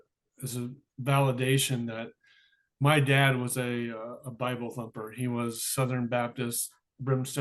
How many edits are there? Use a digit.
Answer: 0